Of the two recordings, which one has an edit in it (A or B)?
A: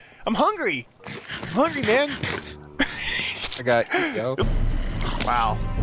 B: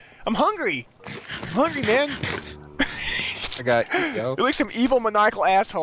B